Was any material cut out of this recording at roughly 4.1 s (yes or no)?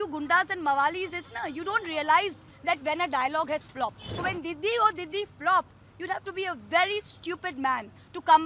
yes